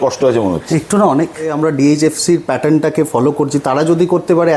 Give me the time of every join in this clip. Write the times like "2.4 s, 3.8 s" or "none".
1.5 s